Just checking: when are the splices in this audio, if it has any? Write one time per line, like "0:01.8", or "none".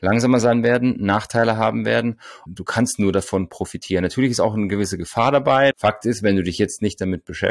0:02.4
0:05.7